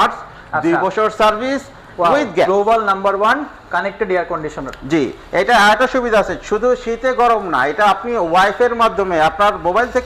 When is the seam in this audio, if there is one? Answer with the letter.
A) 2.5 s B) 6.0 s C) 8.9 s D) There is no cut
A